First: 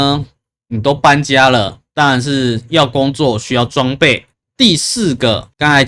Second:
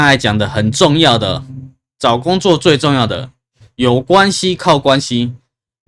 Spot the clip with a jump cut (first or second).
first